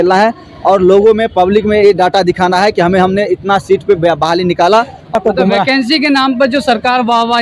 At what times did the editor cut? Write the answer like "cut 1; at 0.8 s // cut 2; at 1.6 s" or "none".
cut 1; at 5.1 s